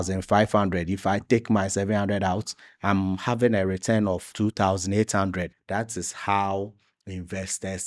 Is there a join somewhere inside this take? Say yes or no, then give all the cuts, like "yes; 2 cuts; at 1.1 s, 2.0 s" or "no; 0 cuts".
yes; 1 cut; at 5.6 s